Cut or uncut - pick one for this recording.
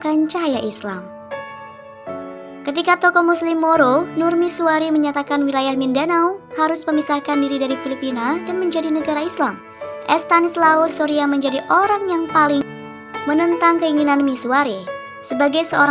cut